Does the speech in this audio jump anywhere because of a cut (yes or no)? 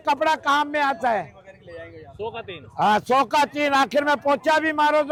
no